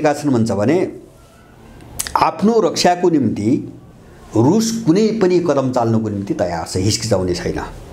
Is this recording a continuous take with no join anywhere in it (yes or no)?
yes